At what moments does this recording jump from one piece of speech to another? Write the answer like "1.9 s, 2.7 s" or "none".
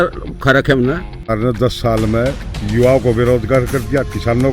1.3 s